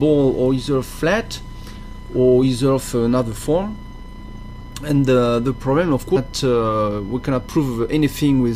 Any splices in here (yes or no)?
no